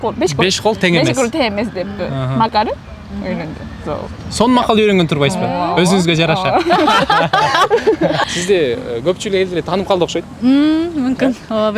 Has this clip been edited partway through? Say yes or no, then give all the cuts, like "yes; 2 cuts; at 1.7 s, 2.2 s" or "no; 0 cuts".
yes; 1 cut; at 8.2 s